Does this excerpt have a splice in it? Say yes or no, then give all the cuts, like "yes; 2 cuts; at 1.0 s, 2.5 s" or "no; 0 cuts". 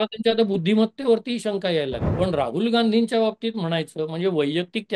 yes; 1 cut; at 2.0 s